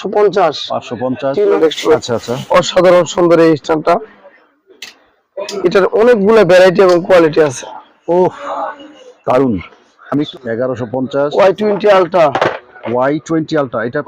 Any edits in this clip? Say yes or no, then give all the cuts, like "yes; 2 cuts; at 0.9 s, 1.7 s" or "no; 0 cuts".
yes; 2 cuts; at 1.6 s, 10.3 s